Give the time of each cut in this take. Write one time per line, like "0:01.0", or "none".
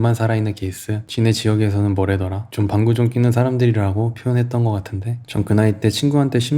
0:01.0
0:05.2